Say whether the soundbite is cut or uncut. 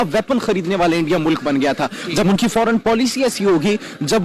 uncut